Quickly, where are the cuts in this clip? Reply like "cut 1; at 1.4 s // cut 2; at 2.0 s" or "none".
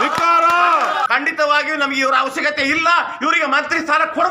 cut 1; at 1.1 s